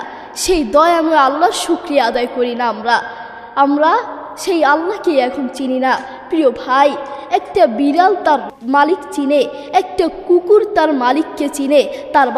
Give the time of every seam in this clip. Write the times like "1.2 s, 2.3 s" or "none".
8.5 s